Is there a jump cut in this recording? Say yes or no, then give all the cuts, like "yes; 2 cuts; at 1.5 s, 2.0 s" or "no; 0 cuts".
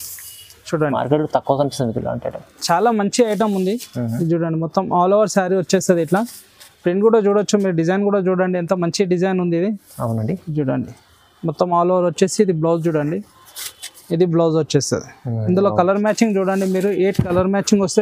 no; 0 cuts